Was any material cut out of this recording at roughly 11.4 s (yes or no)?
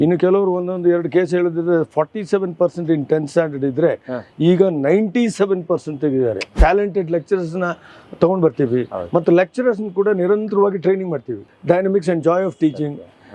yes